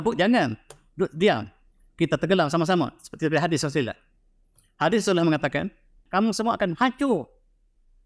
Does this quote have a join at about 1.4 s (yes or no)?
no